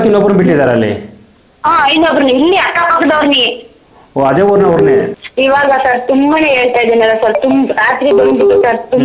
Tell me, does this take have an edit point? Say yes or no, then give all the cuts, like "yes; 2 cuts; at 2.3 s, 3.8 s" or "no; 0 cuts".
yes; 1 cut; at 5.2 s